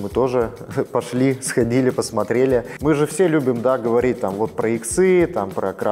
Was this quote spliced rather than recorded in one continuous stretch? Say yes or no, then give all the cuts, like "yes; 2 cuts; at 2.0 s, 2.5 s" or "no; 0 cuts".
yes; 1 cut; at 2.7 s